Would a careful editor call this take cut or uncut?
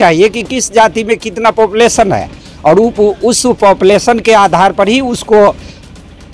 uncut